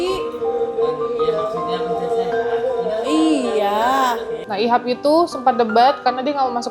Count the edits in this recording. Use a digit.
1